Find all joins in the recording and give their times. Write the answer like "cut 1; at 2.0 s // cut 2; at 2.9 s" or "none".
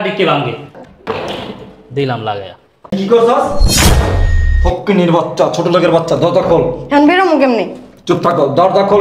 cut 1; at 2.9 s